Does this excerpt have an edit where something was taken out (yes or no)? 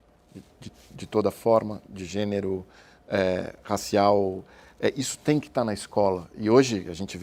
no